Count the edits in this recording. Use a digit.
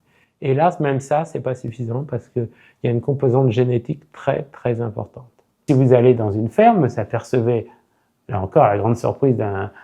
1